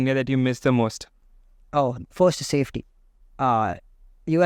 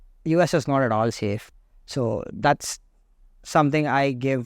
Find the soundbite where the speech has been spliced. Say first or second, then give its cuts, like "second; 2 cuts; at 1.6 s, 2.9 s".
second; 1 cut; at 1.4 s